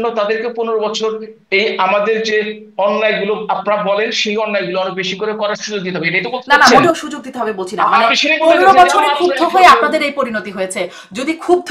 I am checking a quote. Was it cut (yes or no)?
no